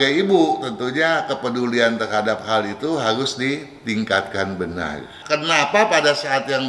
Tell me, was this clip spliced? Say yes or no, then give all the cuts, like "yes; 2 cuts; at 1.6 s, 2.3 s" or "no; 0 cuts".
yes; 1 cut; at 5.1 s